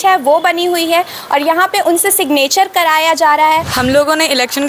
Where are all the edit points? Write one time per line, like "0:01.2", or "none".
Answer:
0:03.7